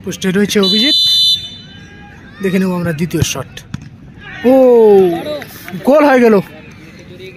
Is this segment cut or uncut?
cut